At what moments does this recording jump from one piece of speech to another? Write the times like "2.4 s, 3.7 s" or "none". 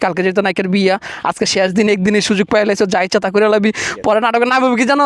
none